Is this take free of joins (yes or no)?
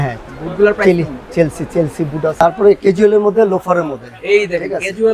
no